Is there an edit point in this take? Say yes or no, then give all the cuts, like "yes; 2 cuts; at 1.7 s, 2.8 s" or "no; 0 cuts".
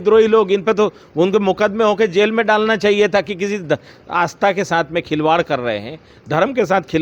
no; 0 cuts